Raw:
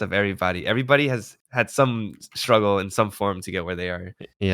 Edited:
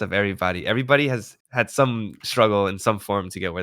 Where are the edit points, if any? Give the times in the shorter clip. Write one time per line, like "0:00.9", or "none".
0:02.2

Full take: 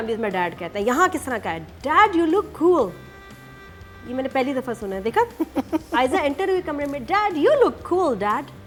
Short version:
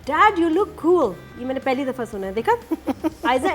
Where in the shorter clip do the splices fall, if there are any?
0:01.3

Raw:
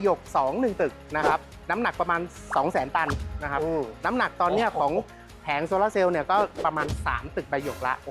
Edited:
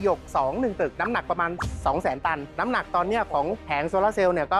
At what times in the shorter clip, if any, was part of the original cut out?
0:01.0
0:02.5
0:03.6

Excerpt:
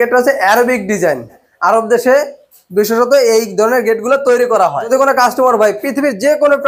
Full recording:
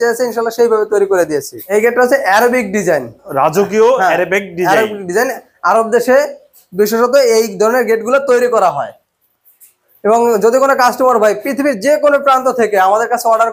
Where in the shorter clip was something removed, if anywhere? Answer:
0:01.4
0:04.9

